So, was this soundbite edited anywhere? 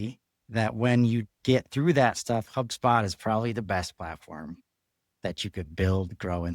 no; 0 cuts

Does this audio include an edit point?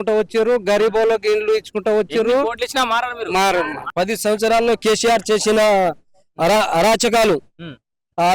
yes; 1 cut; at 3.9 s

